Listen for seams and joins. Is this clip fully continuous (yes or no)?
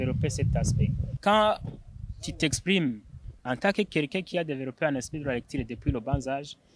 no